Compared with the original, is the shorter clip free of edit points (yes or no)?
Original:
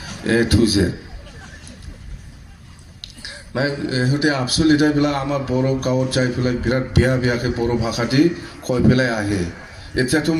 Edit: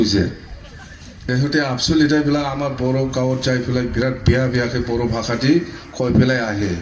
no